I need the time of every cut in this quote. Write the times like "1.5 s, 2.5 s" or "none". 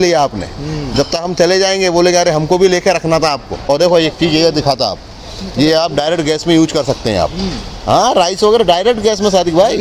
3.6 s